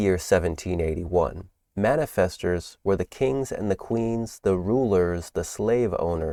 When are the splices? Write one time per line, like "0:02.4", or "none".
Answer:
none

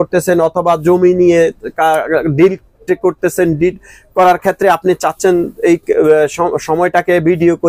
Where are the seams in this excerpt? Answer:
none

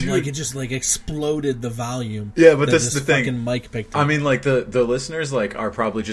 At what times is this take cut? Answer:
0:02.2

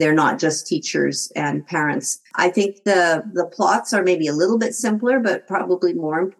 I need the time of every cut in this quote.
0:02.3

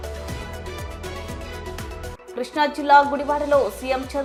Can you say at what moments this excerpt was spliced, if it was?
none

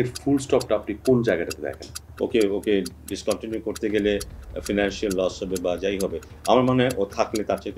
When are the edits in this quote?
0:02.0

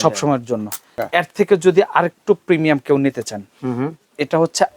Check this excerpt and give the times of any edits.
0:00.9

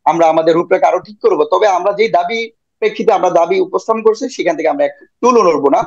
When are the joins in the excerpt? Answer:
none

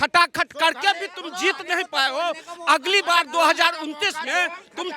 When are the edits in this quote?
none

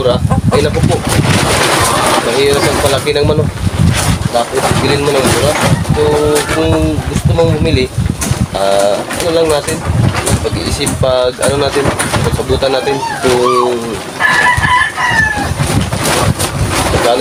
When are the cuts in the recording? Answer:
none

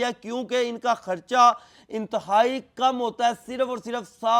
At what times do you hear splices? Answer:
none

